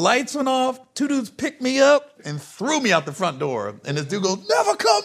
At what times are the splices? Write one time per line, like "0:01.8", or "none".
0:02.1